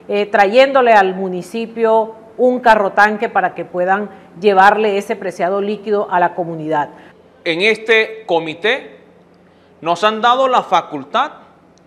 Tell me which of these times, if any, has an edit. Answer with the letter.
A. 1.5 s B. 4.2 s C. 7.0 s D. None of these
C